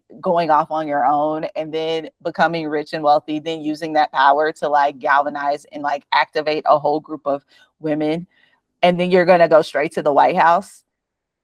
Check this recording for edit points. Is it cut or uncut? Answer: uncut